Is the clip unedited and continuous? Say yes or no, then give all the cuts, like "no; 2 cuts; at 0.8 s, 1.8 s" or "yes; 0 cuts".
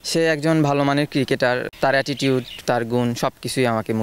yes; 0 cuts